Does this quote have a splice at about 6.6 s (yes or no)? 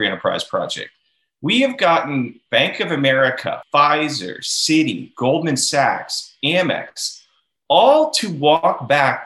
no